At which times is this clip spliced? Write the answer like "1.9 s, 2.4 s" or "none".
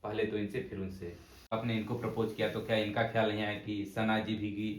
1.5 s